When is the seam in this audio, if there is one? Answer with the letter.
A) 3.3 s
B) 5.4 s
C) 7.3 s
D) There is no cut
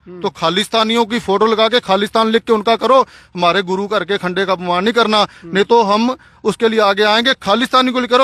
D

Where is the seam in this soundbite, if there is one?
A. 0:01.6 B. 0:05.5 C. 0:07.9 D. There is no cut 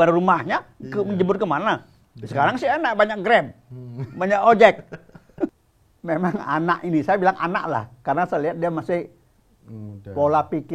B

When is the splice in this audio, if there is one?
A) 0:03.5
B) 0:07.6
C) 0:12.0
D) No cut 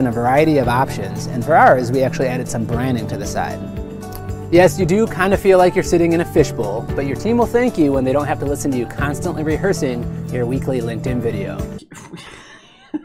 C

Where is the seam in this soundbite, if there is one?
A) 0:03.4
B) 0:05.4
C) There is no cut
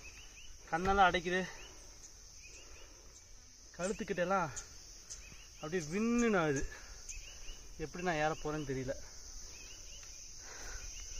C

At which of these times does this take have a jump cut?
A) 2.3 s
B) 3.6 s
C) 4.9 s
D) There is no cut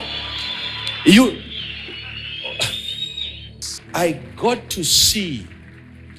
B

